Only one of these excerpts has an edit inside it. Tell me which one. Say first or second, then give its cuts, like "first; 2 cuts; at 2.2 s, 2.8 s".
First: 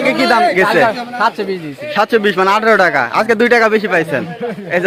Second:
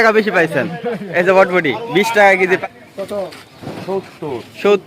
second; 1 cut; at 2.6 s